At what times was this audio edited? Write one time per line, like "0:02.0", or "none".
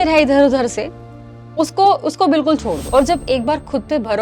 0:02.8